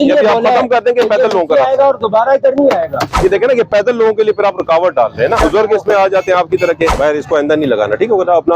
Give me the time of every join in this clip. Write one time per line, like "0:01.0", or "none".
0:03.0
0:05.4
0:06.9